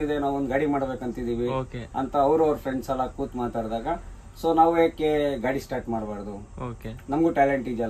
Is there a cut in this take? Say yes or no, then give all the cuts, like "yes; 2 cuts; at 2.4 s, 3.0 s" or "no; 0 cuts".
no; 0 cuts